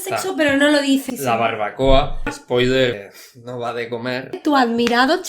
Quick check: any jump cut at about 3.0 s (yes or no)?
yes